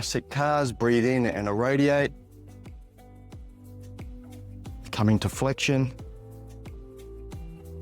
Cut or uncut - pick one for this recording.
cut